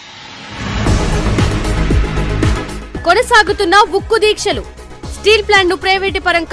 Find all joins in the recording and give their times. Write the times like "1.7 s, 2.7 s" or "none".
2.7 s